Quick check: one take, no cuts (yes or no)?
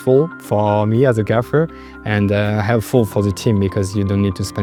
yes